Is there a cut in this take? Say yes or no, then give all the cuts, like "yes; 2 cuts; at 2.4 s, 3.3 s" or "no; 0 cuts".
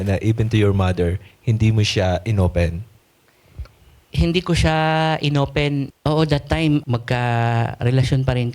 yes; 2 cuts; at 5.9 s, 6.8 s